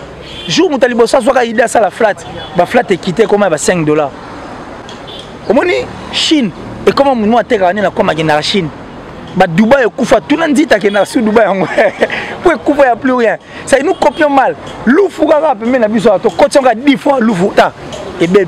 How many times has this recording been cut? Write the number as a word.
zero